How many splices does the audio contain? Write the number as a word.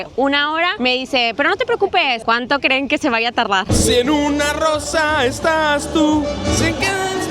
two